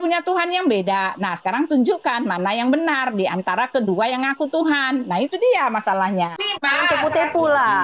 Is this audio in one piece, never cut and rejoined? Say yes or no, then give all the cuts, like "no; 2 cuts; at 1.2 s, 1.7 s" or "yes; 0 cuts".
no; 1 cut; at 6.4 s